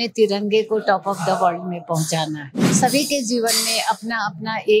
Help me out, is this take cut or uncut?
cut